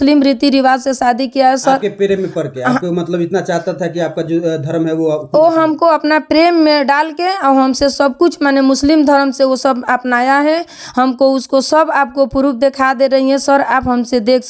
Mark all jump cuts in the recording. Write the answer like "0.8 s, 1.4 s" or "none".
none